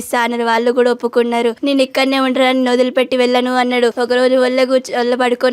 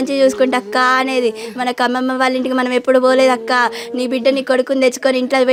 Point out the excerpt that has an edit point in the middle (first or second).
first